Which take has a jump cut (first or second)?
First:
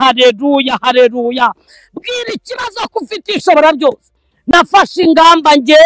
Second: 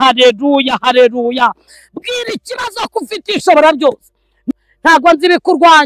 second